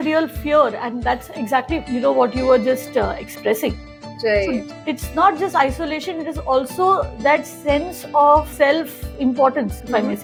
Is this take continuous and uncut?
yes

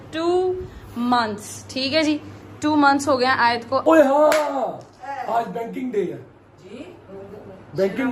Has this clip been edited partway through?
yes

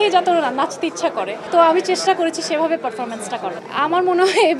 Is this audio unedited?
yes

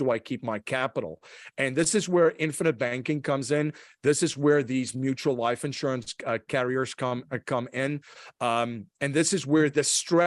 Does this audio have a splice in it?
no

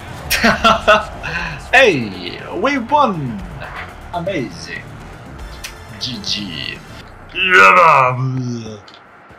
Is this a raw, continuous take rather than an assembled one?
no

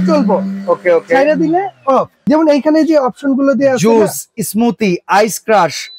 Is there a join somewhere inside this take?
yes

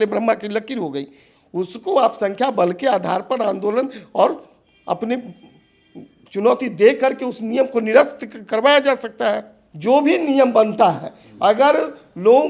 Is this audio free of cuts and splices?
yes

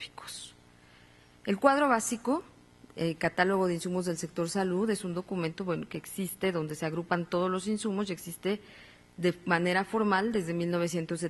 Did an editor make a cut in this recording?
yes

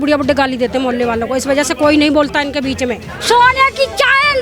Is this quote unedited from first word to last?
no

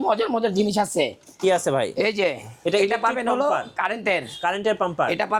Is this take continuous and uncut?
yes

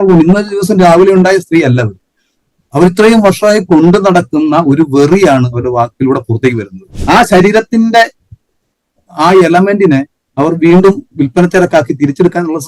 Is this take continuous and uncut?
no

